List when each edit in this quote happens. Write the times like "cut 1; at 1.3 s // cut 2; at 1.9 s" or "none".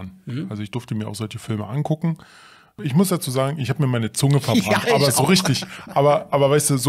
cut 1; at 2.8 s